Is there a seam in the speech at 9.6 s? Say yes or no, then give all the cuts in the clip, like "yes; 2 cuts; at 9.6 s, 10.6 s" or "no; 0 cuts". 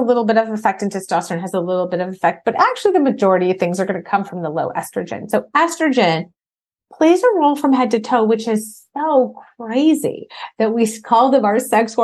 no; 0 cuts